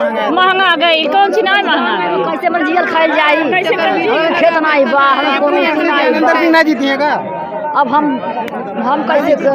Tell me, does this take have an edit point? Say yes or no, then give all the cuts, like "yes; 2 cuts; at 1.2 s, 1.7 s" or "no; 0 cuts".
no; 0 cuts